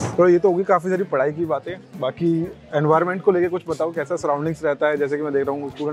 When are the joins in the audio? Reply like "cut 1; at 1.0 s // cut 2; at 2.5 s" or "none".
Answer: none